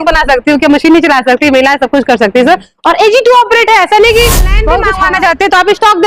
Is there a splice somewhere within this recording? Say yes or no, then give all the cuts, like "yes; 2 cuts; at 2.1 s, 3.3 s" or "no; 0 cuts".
yes; 1 cut; at 4.8 s